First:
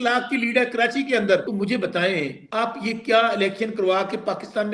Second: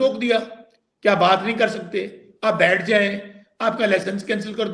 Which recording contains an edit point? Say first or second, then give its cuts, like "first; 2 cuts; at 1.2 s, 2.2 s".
first; 2 cuts; at 1.5 s, 2.4 s